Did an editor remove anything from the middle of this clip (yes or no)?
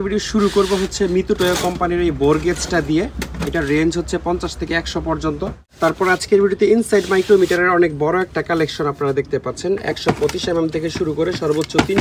yes